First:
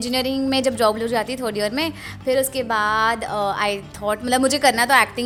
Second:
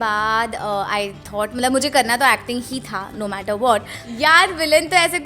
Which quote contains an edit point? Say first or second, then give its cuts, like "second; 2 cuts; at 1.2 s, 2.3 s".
second; 1 cut; at 4.0 s